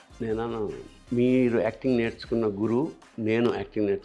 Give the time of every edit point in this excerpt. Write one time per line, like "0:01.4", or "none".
0:00.9
0:03.0

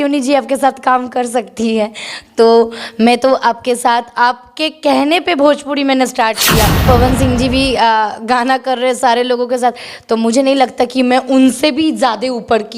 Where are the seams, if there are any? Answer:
0:06.8

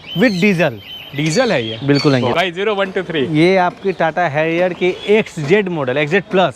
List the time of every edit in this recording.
0:02.3

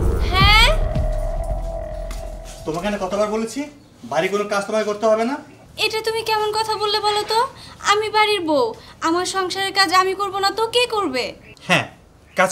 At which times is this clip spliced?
none

